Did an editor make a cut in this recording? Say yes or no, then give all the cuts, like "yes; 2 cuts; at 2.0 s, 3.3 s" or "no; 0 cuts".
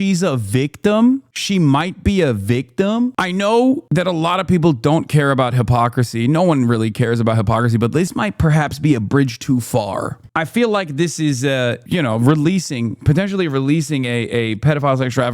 yes; 2 cuts; at 3.1 s, 3.8 s